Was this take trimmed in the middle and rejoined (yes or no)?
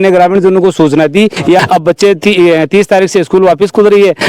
yes